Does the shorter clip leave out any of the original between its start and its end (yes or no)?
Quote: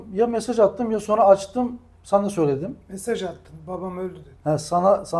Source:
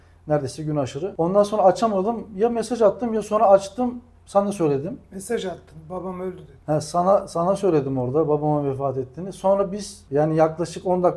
no